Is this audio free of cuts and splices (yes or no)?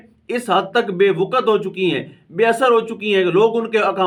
yes